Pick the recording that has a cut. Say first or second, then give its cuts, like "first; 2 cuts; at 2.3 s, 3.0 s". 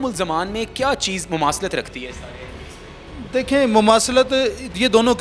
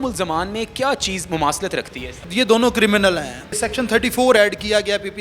second; 2 cuts; at 2.2 s, 3.7 s